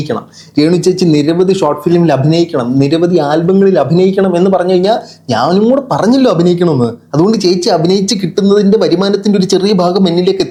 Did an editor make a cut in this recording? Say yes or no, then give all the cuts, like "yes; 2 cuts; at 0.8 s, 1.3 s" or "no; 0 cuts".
no; 0 cuts